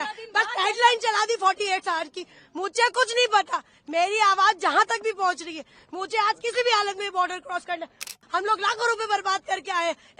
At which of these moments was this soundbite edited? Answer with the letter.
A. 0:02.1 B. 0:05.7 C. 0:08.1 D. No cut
C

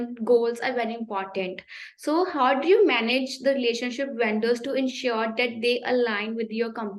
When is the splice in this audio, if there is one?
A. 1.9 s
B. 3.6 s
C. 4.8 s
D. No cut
D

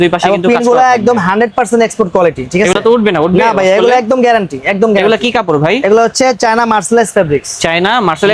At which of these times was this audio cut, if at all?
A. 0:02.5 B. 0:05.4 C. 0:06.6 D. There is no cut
D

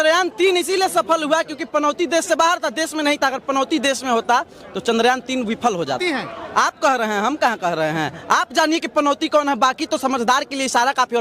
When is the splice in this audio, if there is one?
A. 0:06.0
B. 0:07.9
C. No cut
A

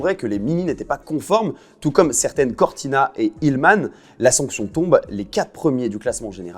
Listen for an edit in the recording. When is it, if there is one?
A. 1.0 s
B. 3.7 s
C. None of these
C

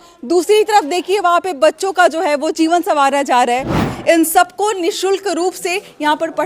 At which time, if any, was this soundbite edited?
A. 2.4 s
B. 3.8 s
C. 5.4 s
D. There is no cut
B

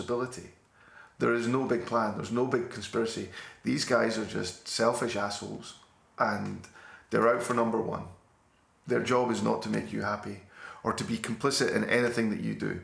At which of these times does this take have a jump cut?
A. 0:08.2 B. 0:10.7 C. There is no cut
C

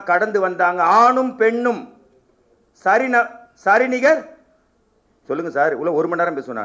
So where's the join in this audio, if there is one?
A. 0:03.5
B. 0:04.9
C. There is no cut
C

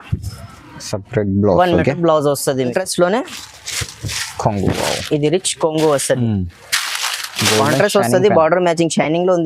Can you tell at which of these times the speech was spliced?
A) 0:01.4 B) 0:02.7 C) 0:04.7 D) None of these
B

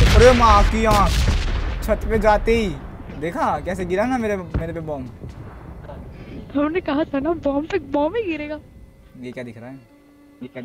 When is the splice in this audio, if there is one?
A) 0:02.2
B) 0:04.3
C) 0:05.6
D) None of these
D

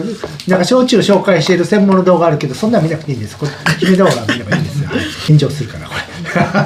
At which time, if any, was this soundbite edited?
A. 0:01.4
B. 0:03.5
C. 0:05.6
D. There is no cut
D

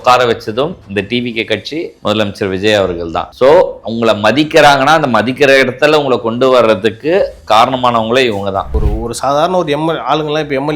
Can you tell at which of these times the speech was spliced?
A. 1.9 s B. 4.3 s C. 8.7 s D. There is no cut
C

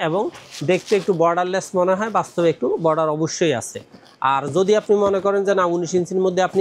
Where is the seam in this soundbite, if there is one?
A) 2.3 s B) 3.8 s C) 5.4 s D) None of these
D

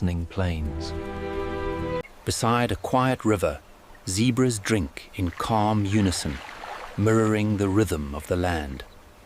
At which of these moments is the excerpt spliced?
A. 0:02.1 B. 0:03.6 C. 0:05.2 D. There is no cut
A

